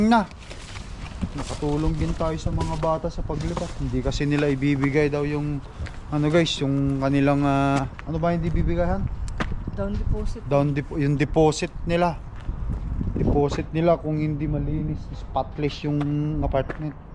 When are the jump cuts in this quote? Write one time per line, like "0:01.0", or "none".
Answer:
none